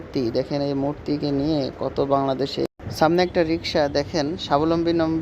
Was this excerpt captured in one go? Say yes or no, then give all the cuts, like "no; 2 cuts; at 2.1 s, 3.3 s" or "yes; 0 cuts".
no; 1 cut; at 2.8 s